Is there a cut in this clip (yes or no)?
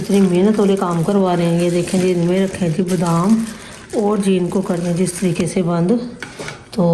no